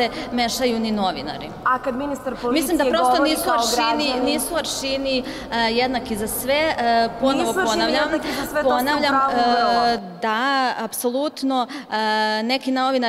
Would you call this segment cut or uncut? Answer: uncut